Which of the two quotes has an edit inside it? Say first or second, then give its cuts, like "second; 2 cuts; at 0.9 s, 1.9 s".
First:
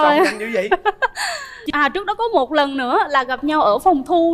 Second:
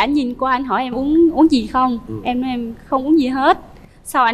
first; 1 cut; at 1.6 s